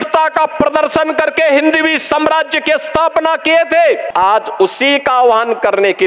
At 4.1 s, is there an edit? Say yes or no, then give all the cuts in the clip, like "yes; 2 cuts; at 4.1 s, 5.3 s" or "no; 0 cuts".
yes; 1 cut; at 4.1 s